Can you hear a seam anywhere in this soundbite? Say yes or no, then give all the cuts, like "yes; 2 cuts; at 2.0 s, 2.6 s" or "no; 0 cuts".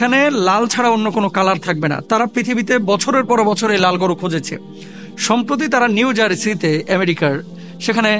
no; 0 cuts